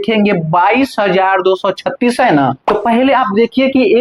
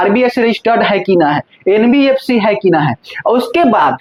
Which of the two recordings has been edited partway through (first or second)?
first